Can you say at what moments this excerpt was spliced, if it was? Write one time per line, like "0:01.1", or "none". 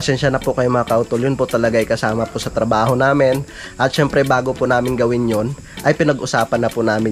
none